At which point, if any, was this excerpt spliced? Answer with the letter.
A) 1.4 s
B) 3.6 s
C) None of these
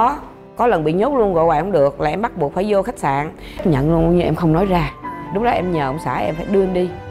B